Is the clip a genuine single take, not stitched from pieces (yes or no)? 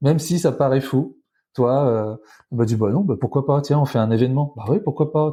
yes